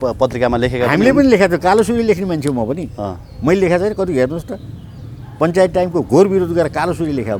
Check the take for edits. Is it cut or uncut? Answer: uncut